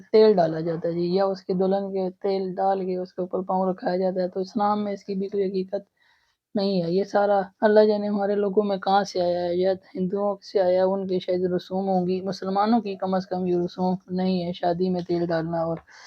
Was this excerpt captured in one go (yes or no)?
yes